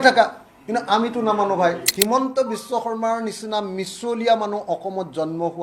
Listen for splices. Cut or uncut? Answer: cut